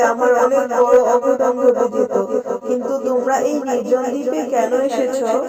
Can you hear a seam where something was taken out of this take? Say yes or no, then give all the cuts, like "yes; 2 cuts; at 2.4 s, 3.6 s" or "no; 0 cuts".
no; 0 cuts